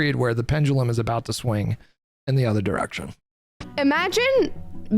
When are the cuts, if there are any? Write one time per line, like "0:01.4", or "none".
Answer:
none